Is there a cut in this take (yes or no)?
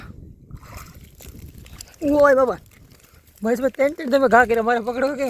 no